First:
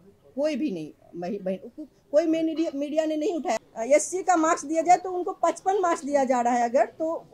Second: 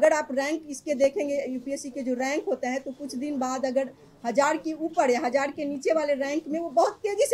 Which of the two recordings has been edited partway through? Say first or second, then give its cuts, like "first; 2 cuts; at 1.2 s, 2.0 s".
first; 1 cut; at 3.6 s